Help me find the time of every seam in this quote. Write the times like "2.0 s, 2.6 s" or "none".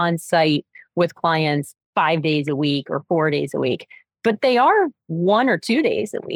1.8 s

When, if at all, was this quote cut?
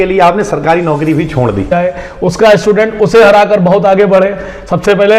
1.7 s

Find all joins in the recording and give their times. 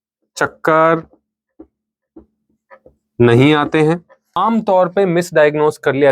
4.4 s

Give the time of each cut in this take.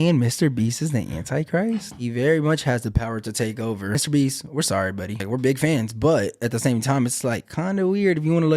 2.0 s, 3.9 s, 5.2 s

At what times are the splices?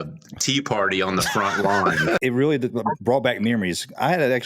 2.2 s

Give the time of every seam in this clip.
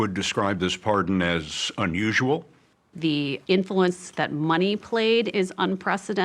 5.3 s

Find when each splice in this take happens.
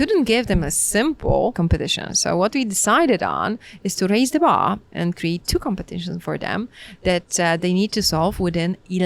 1.6 s

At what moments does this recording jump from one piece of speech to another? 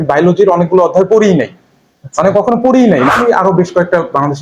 3.1 s

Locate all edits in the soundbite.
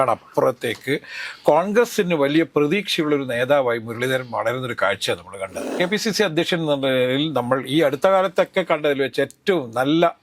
5.7 s

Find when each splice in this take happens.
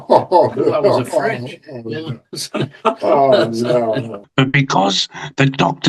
4.2 s

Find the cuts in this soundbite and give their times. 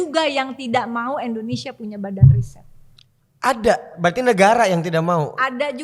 none

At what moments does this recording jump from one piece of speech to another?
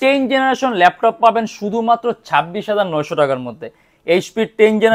none

